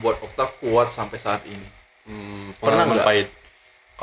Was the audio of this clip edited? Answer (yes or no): no